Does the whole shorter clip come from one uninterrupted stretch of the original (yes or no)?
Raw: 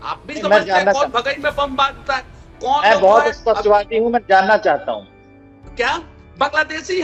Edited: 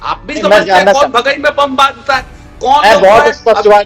yes